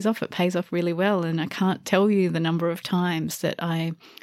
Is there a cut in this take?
no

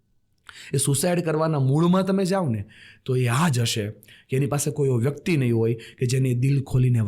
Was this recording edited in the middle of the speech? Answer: no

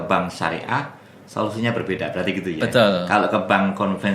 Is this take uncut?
yes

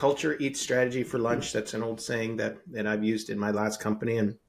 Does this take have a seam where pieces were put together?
no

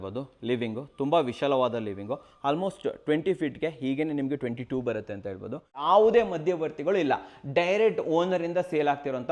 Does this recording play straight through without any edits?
no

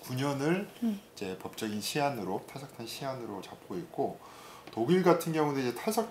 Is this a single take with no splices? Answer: yes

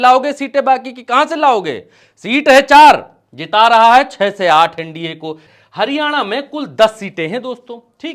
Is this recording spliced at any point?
yes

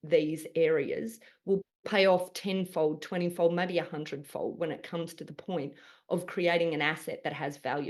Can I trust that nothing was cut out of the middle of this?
yes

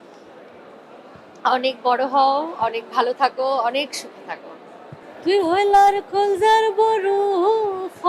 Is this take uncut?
yes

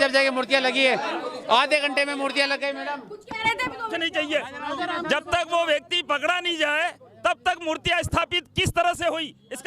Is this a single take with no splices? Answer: no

